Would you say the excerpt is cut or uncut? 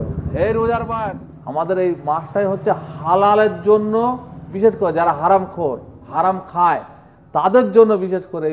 cut